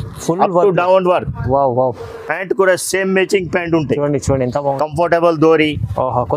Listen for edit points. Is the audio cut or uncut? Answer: cut